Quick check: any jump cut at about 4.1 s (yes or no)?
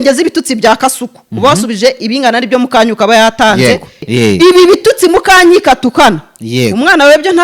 yes